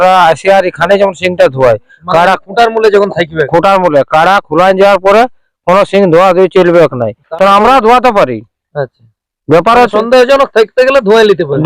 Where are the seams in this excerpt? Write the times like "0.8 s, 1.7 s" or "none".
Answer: 7.2 s